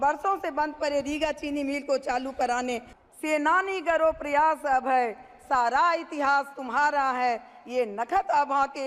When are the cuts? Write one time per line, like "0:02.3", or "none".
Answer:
0:02.9